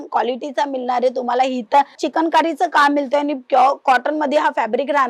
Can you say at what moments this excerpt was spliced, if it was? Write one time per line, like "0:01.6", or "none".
0:02.0